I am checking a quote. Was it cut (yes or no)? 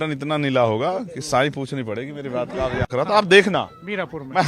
yes